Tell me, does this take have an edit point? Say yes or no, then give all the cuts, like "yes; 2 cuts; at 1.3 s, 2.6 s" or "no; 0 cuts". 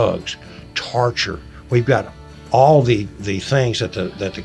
no; 0 cuts